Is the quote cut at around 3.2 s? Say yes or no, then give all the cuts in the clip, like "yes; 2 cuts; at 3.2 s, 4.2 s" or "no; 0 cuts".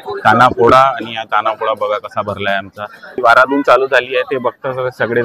yes; 1 cut; at 3.2 s